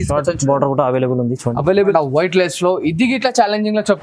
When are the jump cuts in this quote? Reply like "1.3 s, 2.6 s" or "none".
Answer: 1.9 s